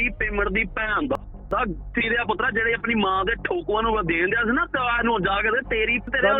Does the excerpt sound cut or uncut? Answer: uncut